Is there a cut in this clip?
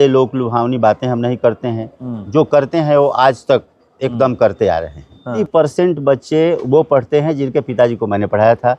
yes; 1 cut; at 5.4 s

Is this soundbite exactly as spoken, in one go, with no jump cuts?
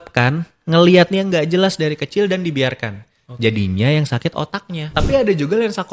no; 1 cut; at 4.8 s

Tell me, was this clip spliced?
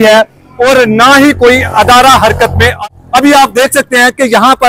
yes; 1 cut; at 2.8 s

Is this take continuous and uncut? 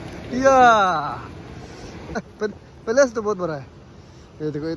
no; 1 cut; at 2.2 s

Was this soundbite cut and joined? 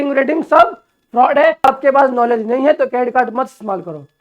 yes; 1 cut; at 1.7 s

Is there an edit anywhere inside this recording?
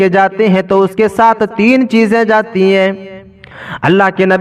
no; 0 cuts

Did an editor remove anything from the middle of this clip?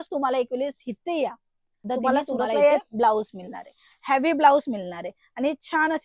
yes; 1 cut; at 2.8 s

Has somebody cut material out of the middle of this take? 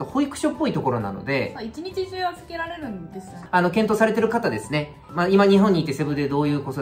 yes; 2 cuts; at 3.3 s, 5.0 s

